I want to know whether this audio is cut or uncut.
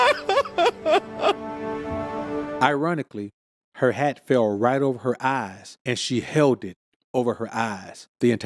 cut